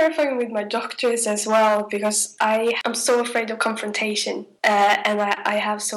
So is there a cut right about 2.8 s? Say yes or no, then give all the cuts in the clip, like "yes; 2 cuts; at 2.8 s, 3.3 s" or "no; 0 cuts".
yes; 2 cuts; at 2.8 s, 4.5 s